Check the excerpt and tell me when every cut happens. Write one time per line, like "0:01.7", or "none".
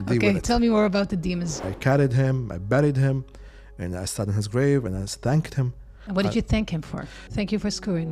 0:01.7
0:05.9
0:07.2